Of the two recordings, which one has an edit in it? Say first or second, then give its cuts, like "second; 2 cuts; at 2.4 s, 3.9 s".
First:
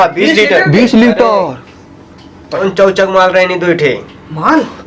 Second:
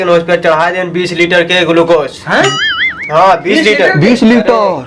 first; 1 cut; at 2.6 s